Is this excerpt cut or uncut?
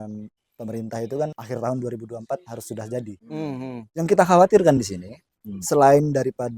cut